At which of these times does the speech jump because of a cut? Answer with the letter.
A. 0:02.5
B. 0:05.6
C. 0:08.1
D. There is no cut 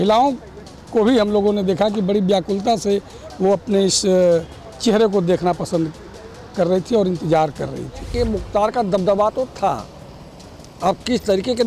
C